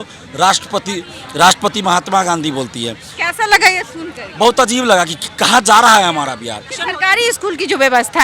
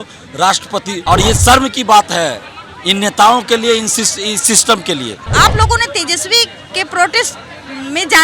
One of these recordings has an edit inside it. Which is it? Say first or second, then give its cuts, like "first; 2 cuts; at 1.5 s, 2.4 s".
second; 2 cuts; at 0.9 s, 5.2 s